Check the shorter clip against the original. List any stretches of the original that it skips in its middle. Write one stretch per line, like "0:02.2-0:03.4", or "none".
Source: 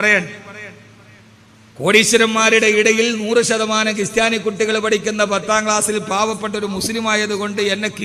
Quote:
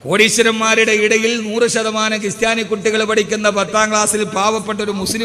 none